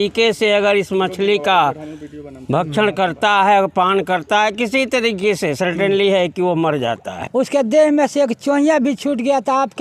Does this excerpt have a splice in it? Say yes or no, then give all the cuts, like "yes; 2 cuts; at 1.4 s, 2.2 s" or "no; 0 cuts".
yes; 1 cut; at 7.2 s